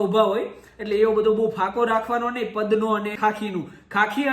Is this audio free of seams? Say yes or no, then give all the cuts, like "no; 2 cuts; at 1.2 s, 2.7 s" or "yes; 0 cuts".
no; 1 cut; at 3.1 s